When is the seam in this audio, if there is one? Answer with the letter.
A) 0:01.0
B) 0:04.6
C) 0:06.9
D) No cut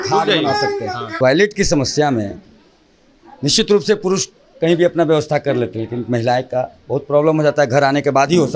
A